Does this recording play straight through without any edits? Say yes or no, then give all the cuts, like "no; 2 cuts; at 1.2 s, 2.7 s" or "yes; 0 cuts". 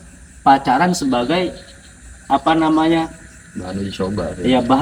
yes; 0 cuts